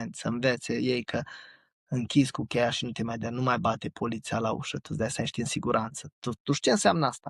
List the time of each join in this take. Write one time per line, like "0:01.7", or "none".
none

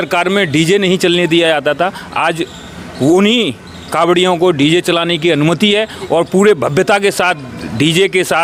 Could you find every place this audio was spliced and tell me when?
none

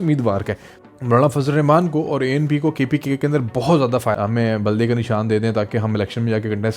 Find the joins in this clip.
0:04.1

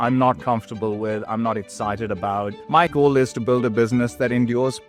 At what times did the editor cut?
0:02.6

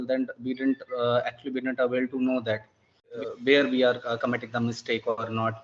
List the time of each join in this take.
0:03.1

